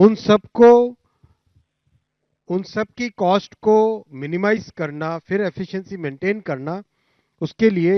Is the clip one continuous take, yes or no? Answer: yes